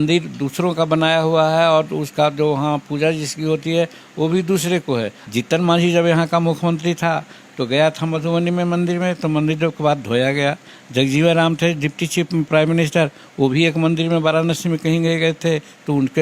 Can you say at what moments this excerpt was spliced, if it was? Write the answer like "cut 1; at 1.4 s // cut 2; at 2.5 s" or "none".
cut 1; at 5.2 s